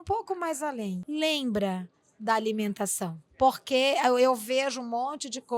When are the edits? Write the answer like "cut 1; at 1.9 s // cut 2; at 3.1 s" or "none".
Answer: cut 1; at 1.0 s // cut 2; at 3.2 s

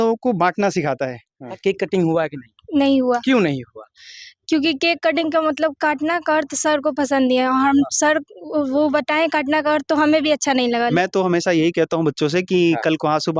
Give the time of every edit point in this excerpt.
cut 1; at 1.5 s // cut 2; at 10.9 s

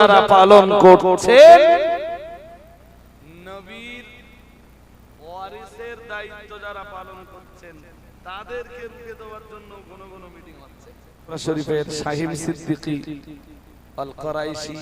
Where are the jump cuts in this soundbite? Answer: cut 1; at 11.3 s

